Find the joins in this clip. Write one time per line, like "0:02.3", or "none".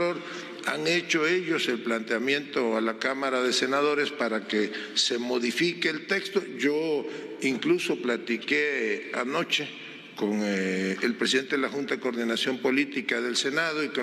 none